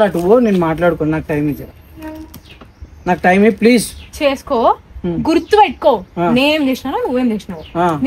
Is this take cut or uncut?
uncut